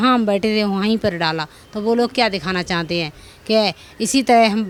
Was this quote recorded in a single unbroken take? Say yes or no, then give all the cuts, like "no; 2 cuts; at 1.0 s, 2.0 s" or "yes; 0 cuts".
yes; 0 cuts